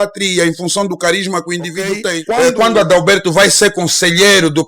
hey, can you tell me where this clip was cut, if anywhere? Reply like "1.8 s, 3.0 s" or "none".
2.2 s